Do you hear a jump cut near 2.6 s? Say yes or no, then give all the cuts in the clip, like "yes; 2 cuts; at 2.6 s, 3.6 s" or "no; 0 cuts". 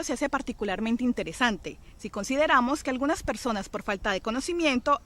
yes; 1 cut; at 2.6 s